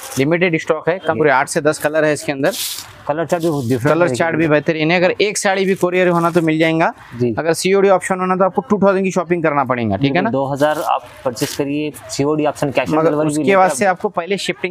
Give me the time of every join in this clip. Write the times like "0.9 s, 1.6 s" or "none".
1.2 s